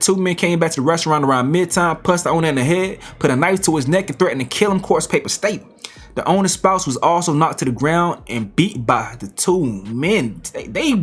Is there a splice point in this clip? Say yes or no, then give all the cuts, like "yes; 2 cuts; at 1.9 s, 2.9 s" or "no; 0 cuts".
no; 0 cuts